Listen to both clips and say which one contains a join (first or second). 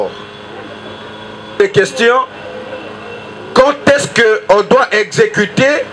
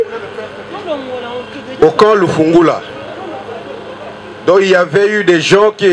first